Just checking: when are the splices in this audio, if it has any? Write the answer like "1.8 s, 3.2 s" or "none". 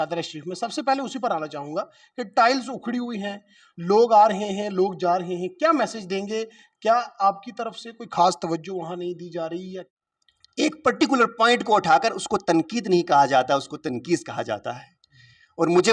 9.7 s